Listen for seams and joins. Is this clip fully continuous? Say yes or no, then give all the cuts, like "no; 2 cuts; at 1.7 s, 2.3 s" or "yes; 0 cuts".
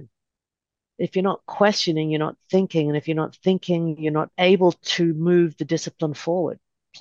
no; 1 cut; at 4.3 s